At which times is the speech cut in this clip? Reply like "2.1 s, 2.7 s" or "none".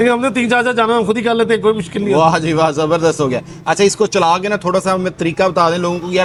none